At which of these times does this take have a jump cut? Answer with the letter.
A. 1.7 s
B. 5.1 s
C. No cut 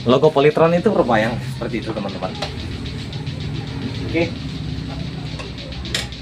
C